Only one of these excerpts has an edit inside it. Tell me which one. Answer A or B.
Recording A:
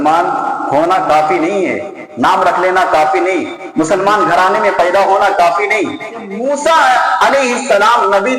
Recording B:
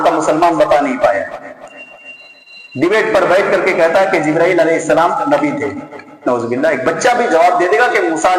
A